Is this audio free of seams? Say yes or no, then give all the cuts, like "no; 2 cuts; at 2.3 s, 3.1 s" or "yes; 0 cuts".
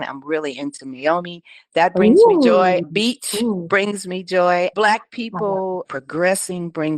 no; 2 cuts; at 2.8 s, 4.7 s